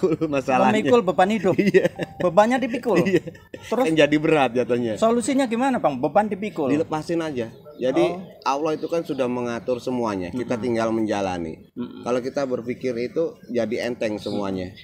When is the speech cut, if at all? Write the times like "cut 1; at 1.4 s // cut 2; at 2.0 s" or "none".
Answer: none